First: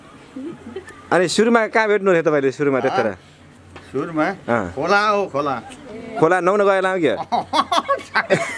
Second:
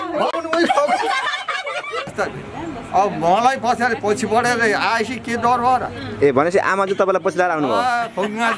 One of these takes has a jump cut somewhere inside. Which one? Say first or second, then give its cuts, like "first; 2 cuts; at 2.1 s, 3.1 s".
second; 1 cut; at 2.1 s